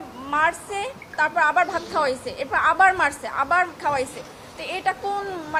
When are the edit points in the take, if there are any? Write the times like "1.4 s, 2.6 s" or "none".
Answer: none